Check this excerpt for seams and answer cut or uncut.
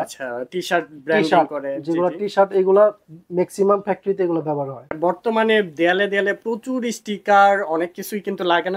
cut